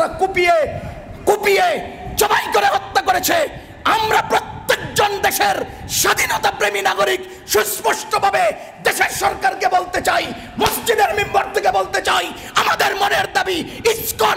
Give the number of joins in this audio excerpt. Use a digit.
0